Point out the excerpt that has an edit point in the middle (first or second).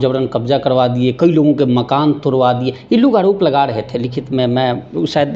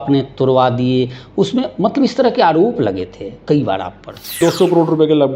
second